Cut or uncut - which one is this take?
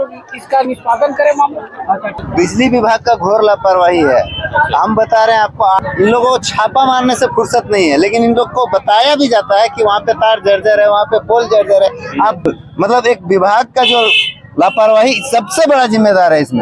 cut